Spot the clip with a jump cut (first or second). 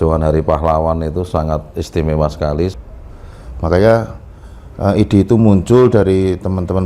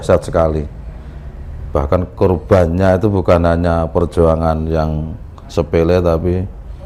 first